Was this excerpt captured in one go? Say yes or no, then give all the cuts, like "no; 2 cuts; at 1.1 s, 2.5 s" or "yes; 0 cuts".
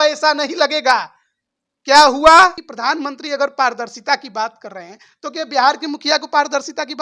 no; 1 cut; at 2.7 s